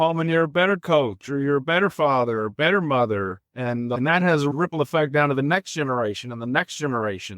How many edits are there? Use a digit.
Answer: 1